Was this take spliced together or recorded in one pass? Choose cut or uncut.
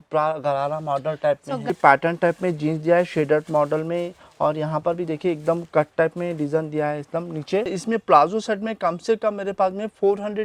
cut